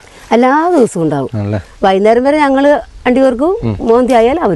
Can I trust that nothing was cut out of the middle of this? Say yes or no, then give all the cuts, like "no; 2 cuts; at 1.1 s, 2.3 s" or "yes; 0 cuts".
yes; 0 cuts